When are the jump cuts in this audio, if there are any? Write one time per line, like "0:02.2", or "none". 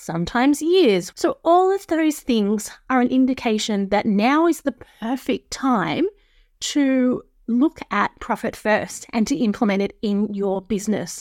0:01.1